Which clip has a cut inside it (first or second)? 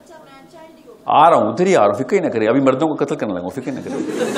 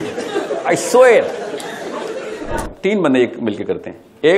second